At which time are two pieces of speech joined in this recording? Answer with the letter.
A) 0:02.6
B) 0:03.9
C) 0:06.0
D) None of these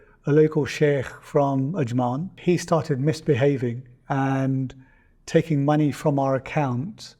A